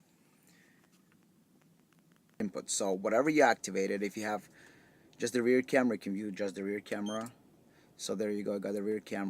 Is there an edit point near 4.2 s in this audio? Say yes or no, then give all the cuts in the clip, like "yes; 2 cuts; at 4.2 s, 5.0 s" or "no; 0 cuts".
no; 1 cut; at 2.4 s